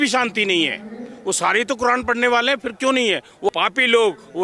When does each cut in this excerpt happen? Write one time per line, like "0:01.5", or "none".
0:03.5